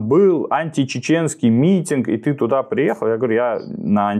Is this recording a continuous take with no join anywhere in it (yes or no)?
yes